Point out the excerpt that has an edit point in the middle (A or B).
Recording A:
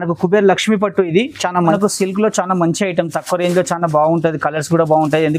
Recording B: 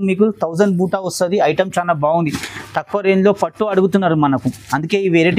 A